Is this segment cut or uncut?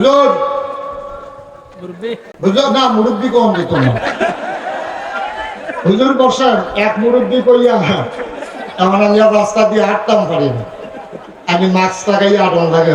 cut